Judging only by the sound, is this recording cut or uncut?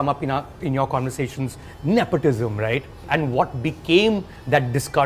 cut